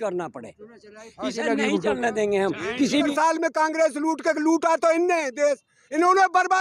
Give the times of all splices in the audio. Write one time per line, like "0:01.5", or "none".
0:03.1